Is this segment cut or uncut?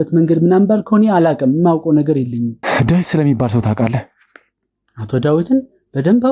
cut